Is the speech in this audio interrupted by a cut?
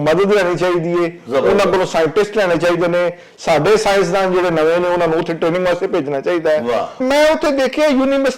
yes; 1 cut; at 7.0 s

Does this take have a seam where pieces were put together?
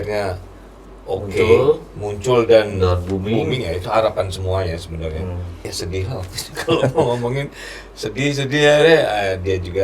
yes; 1 cut; at 5.7 s

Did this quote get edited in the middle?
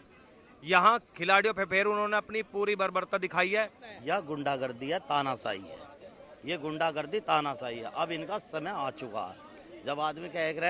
yes; 1 cut; at 3.9 s

